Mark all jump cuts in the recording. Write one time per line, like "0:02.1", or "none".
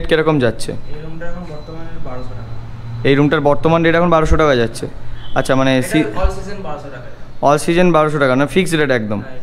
none